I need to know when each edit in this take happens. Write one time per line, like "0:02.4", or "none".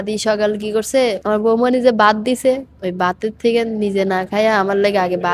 0:01.2